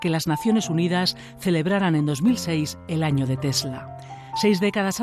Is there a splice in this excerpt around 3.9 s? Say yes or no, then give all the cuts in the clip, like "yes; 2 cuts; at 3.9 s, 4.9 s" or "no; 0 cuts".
yes; 1 cut; at 3.9 s